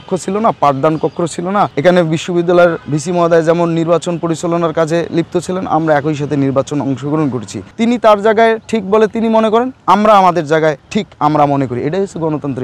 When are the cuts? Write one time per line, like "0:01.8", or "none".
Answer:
0:07.7